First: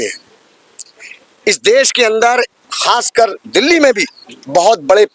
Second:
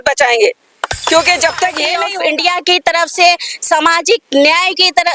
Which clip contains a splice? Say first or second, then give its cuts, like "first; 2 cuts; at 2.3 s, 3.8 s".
second; 1 cut; at 2.0 s